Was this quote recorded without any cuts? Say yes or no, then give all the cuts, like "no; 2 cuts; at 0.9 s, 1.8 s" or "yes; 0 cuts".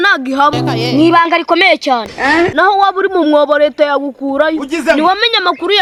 yes; 0 cuts